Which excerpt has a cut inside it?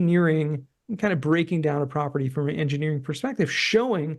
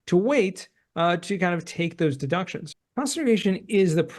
second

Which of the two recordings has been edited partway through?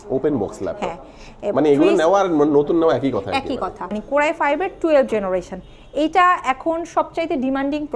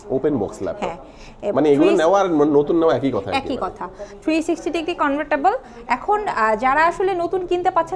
first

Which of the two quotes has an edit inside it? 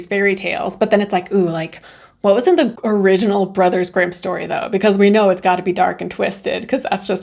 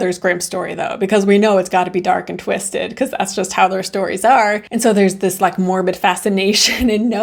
first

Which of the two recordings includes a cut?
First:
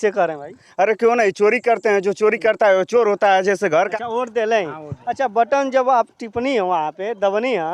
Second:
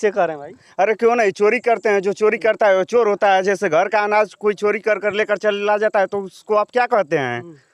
first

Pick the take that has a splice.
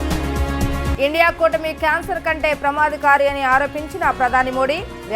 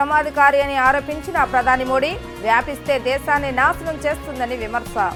first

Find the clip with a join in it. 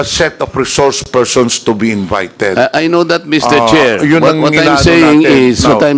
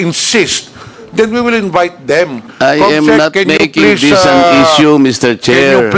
second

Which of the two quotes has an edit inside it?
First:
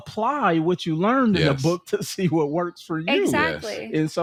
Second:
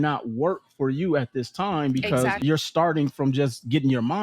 second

